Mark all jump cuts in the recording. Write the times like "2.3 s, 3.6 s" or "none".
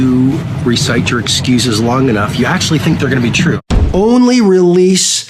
3.6 s